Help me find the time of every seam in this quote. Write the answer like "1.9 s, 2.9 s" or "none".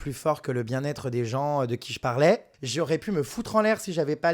2.6 s